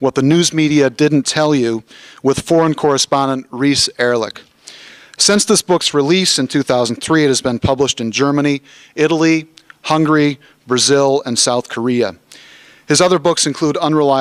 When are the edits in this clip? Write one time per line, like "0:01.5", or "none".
none